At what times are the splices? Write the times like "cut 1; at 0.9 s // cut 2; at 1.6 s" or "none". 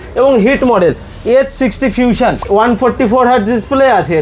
cut 1; at 2.4 s